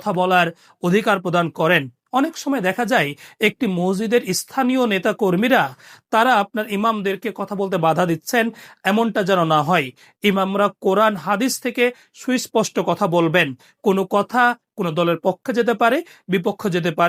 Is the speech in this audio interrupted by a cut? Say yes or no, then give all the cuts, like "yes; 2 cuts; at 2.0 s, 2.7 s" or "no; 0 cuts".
no; 0 cuts